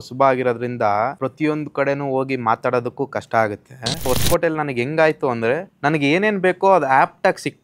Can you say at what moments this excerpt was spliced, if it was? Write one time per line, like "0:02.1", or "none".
0:01.2
0:04.1
0:05.7